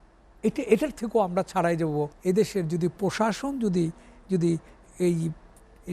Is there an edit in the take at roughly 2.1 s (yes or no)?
yes